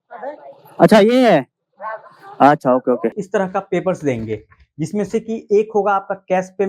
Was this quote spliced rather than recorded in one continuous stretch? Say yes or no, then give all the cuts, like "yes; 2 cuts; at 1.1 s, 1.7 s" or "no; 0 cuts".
yes; 1 cut; at 3.2 s